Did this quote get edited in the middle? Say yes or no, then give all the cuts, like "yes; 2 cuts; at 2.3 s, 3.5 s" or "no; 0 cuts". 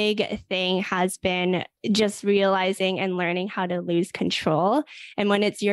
yes; 1 cut; at 1.7 s